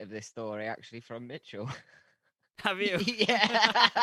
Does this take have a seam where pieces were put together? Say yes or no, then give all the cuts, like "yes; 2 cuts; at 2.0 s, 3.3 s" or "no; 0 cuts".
no; 0 cuts